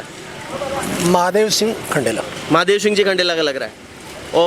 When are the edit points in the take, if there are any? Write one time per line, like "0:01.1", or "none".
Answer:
none